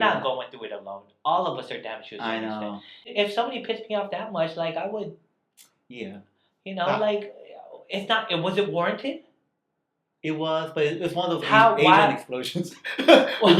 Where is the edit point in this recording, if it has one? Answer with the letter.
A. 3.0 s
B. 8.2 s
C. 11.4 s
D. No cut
A